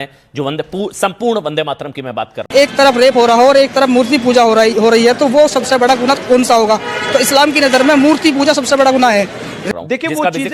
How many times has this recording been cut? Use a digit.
0